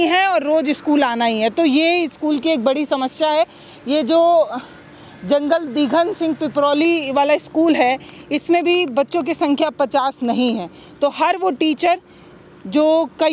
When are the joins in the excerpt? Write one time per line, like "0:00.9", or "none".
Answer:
none